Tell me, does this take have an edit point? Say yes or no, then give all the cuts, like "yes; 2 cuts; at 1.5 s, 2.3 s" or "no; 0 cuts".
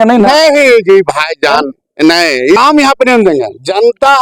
yes; 1 cut; at 2.6 s